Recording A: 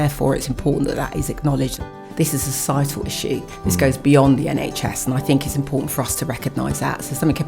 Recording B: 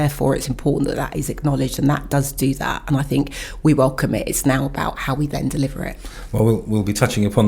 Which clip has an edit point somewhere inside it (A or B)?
A